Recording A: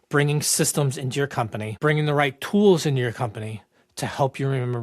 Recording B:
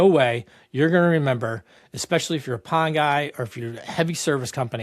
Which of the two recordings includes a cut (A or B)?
A